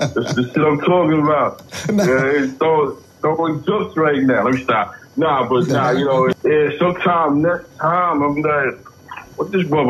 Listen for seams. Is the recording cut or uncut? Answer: cut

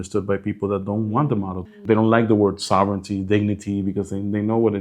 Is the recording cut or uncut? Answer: cut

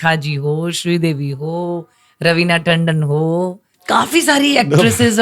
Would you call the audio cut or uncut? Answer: cut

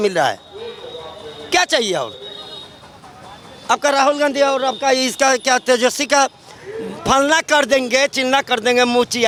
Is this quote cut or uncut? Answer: uncut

